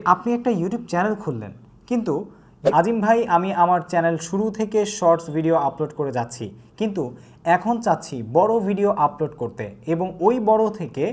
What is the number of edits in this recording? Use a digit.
1